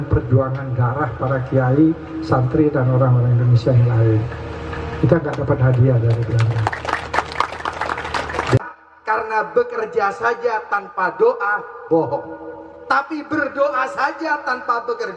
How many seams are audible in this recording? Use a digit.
1